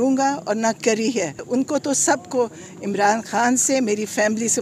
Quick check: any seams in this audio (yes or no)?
yes